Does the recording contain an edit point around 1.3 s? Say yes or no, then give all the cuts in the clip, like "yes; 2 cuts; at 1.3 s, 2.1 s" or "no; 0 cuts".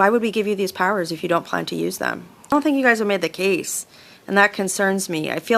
no; 1 cut; at 2.5 s